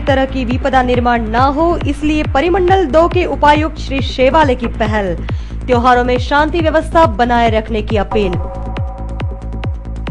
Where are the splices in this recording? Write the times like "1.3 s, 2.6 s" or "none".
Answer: 3.0 s